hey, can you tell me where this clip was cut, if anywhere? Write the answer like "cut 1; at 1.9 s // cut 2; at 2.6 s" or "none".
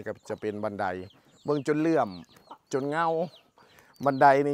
none